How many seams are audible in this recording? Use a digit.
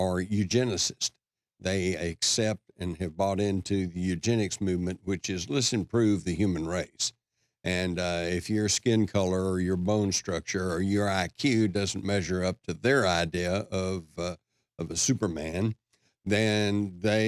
1